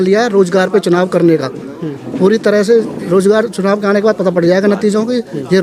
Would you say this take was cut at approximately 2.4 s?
no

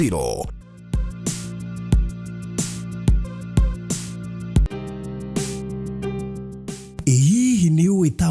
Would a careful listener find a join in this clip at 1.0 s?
no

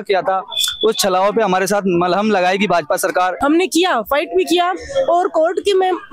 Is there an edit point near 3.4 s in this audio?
yes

